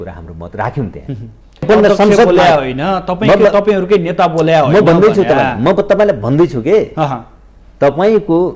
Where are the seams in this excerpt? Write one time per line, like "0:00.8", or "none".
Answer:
0:01.6